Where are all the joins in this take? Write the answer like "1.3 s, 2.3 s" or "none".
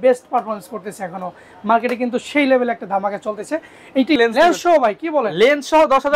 4.2 s